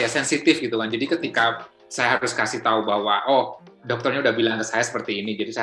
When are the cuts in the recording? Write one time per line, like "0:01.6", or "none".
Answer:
none